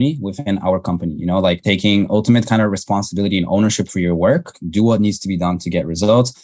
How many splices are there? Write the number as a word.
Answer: two